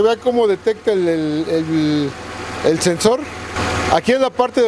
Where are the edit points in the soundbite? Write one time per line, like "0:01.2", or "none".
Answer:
0:03.6